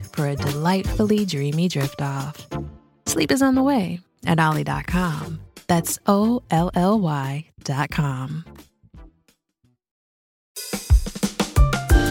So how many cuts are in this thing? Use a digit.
1